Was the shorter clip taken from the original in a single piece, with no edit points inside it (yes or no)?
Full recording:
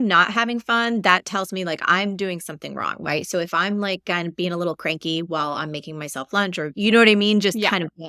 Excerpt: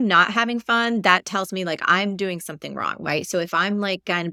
yes